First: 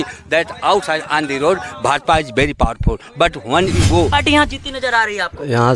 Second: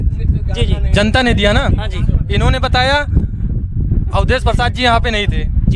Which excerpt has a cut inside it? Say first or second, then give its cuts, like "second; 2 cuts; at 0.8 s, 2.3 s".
first; 1 cut; at 4.1 s